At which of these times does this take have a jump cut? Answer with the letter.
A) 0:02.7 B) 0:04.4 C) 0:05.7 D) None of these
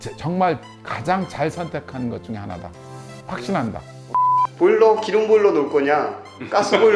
B